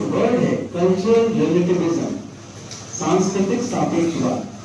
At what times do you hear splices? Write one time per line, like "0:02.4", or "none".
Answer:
none